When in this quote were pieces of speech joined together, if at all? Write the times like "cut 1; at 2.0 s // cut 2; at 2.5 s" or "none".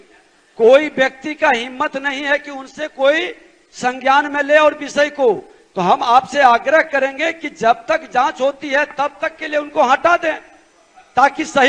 none